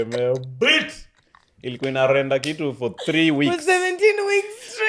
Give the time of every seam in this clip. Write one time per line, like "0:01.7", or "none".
none